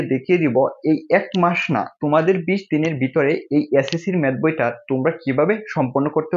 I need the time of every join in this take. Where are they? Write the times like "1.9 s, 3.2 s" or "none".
none